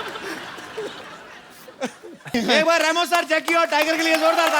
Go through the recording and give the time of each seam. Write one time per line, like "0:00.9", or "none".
0:02.3